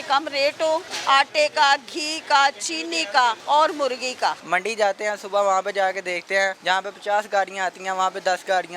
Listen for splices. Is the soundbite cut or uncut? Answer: cut